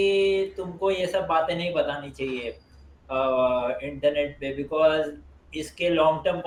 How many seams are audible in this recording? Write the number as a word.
zero